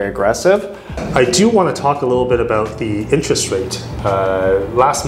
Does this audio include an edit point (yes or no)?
yes